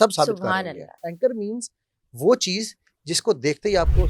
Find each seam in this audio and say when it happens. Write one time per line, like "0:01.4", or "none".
0:00.9